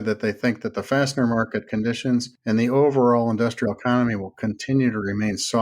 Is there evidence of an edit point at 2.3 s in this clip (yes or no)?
yes